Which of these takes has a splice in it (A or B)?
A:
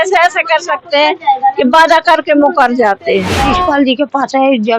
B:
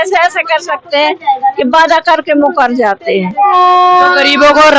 A